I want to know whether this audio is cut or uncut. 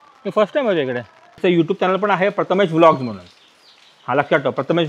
cut